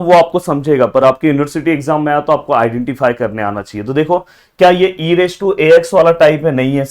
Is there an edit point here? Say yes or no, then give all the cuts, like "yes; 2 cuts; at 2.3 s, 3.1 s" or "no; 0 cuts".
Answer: no; 0 cuts